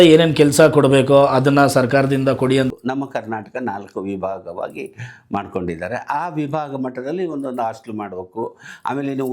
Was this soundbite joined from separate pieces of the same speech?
yes; 1 cut; at 2.8 s

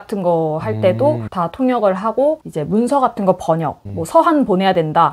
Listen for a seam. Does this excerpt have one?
yes; 1 cut; at 1.3 s

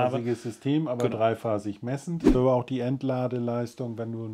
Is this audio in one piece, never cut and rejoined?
no; 1 cut; at 2.3 s

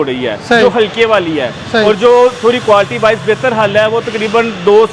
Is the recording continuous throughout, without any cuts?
yes; 0 cuts

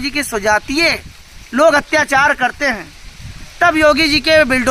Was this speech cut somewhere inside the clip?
no; 0 cuts

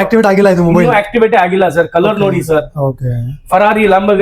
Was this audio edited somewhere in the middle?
no; 0 cuts

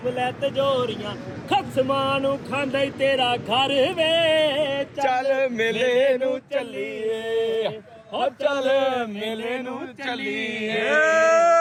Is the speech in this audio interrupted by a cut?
no; 0 cuts

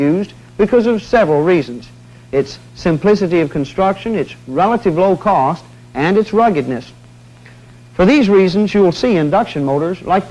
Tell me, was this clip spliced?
no; 0 cuts

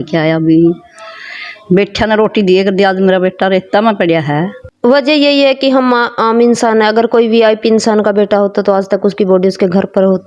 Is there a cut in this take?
yes; 1 cut; at 4.6 s

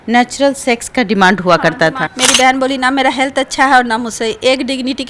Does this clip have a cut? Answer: yes; 1 cut; at 2.1 s

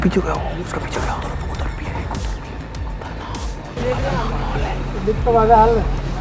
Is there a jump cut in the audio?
no; 0 cuts

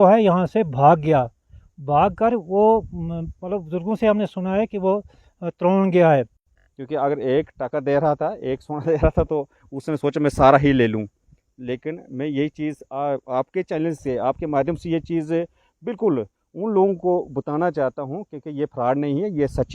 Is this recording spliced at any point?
yes; 1 cut; at 6.4 s

